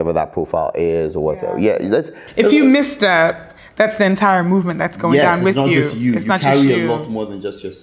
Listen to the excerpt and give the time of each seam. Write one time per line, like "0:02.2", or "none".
none